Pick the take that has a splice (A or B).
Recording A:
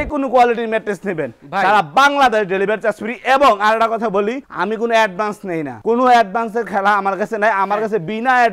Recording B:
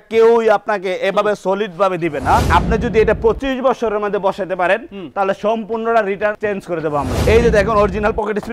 B